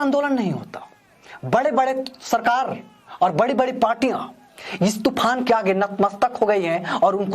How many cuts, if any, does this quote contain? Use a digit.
0